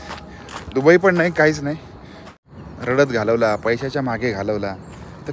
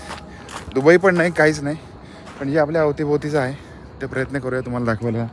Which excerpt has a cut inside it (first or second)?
first